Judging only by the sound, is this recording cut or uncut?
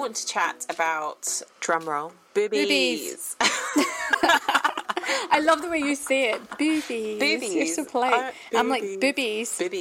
cut